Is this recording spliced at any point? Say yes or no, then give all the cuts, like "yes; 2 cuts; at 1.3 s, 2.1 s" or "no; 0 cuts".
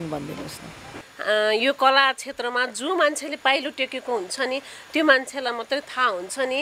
no; 0 cuts